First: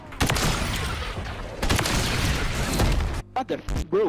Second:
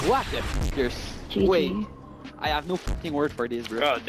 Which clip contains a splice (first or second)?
first